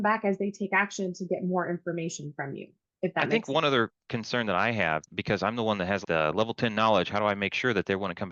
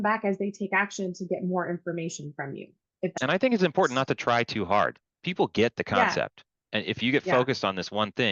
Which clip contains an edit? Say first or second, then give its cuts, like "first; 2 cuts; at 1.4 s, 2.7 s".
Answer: second; 1 cut; at 3.2 s